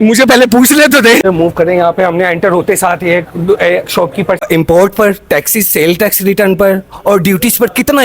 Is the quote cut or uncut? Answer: cut